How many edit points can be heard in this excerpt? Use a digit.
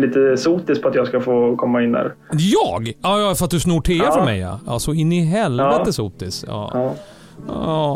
0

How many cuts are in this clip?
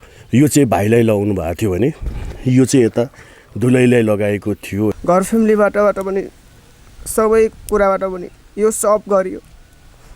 1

